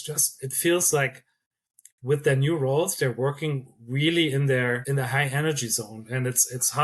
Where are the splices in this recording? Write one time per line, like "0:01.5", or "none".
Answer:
0:04.8